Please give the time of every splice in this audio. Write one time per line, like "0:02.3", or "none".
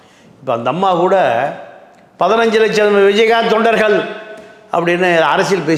none